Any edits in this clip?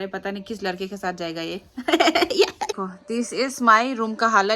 yes; 1 cut; at 3.1 s

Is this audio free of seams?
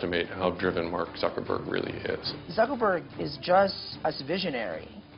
no; 2 cuts; at 2.3 s, 3.9 s

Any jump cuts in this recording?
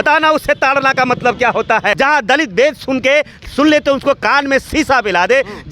yes; 1 cut; at 1.9 s

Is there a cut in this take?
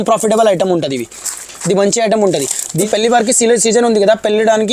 yes; 1 cut; at 2.8 s

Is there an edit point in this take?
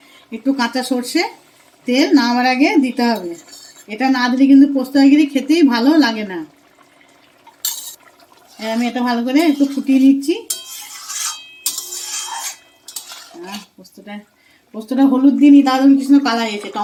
no; 0 cuts

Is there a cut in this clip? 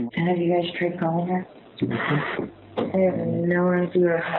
no; 0 cuts

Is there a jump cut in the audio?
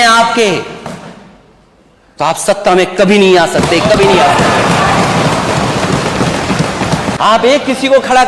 yes; 1 cut; at 7.2 s

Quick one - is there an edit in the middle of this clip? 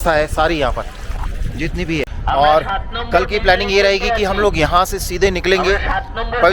yes; 1 cut; at 2.0 s

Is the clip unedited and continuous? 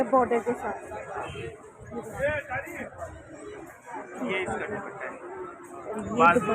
yes; 0 cuts

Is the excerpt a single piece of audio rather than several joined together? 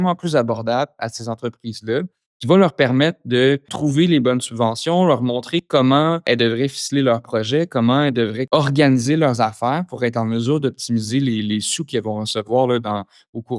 no; 3 cuts; at 3.7 s, 6.2 s, 8.4 s

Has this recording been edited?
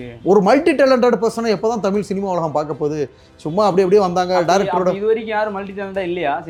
no; 0 cuts

